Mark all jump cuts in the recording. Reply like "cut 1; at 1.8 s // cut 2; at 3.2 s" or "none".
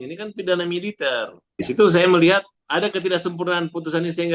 cut 1; at 1.5 s // cut 2; at 2.6 s